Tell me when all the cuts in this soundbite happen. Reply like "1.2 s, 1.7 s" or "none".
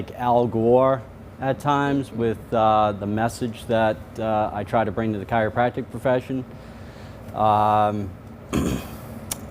1.9 s